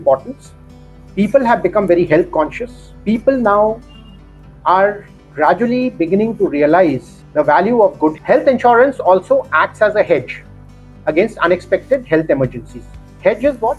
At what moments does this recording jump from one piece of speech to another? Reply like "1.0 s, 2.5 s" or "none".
8.2 s